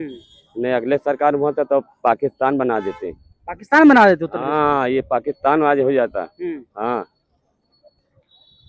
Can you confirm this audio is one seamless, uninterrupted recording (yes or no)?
yes